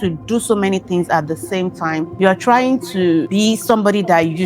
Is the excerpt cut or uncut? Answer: cut